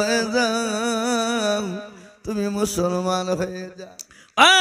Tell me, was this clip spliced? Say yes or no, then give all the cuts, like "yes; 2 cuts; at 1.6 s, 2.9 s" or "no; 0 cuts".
yes; 1 cut; at 3.6 s